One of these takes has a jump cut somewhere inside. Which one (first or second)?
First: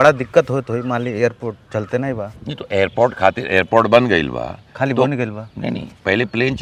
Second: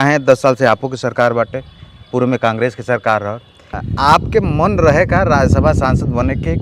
second